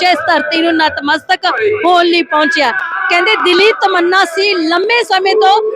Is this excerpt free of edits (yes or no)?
yes